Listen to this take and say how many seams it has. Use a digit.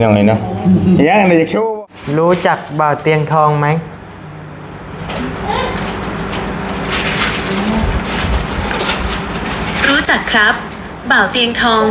1